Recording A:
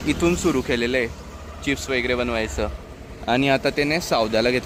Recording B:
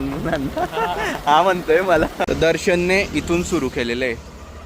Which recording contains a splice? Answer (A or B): B